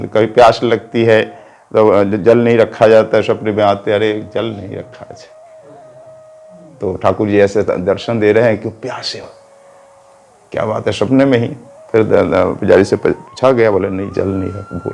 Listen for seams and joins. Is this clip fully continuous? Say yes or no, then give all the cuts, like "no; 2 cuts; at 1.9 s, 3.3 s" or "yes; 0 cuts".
yes; 0 cuts